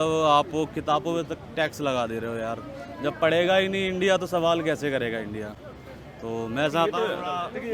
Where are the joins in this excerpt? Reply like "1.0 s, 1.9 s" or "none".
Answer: none